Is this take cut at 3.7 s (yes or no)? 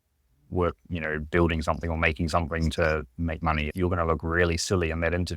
yes